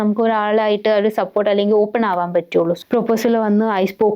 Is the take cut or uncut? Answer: cut